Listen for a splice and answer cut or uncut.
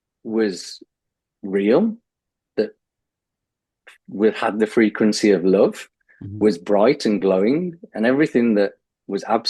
uncut